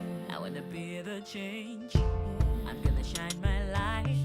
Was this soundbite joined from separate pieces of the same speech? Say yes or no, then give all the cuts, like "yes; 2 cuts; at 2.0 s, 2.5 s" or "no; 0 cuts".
no; 0 cuts